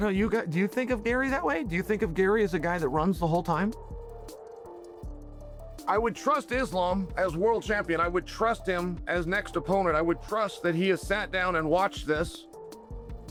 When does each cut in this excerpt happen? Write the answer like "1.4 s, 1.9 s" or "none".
none